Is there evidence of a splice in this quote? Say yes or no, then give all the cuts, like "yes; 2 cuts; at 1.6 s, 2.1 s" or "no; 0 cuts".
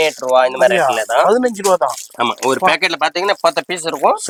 no; 0 cuts